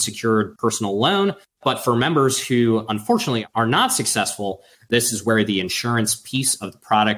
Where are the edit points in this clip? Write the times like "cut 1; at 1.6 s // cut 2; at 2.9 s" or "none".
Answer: cut 1; at 1.5 s // cut 2; at 4.7 s